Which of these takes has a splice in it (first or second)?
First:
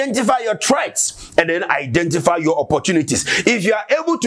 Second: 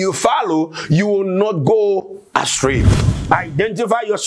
second